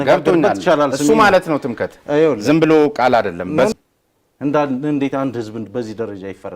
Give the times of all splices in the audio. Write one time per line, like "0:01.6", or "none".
0:03.7